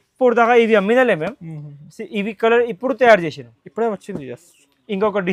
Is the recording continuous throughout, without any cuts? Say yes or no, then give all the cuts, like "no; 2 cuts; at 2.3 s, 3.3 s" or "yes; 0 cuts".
yes; 0 cuts